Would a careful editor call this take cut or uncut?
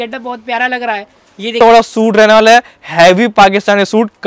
cut